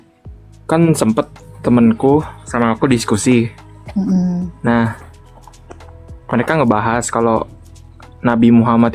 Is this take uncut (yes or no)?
yes